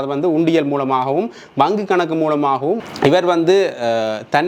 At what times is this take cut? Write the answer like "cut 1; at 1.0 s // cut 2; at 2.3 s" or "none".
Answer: cut 1; at 2.8 s